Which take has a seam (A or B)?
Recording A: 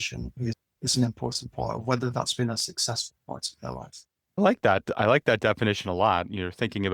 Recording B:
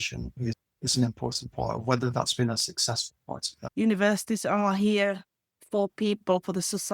B